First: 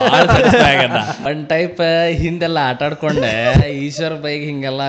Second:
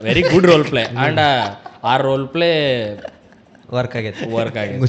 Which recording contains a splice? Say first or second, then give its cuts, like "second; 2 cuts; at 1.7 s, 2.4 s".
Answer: first; 1 cut; at 1.2 s